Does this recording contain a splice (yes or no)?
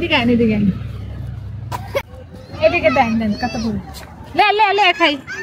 yes